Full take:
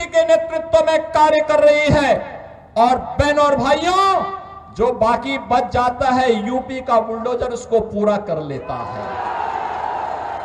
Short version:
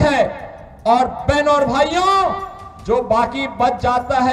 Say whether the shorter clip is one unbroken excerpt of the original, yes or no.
yes